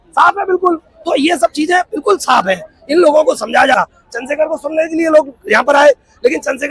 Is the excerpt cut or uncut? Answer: cut